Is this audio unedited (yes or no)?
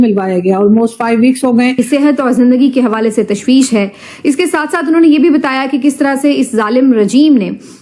no